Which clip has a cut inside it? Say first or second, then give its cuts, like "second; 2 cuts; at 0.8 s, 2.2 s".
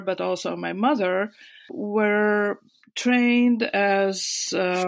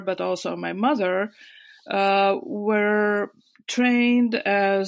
first; 1 cut; at 1.8 s